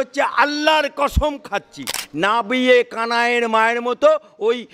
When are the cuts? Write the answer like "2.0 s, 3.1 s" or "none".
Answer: 2.0 s